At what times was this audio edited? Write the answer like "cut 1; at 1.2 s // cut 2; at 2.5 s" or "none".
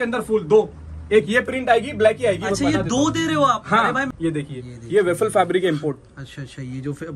cut 1; at 4.1 s